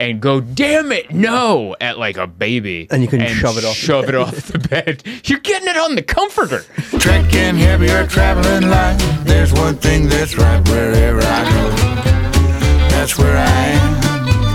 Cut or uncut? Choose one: cut